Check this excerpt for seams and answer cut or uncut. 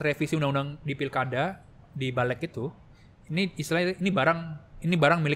uncut